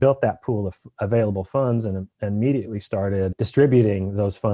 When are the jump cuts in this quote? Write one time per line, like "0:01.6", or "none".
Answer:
none